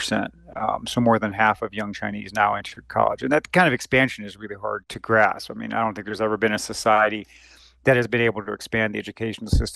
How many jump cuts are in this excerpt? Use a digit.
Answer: 1